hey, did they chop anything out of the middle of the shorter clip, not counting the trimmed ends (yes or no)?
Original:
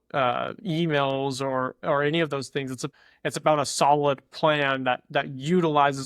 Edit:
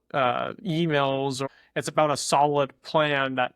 yes